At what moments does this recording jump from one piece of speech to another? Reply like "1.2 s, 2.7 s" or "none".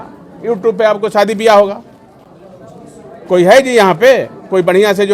none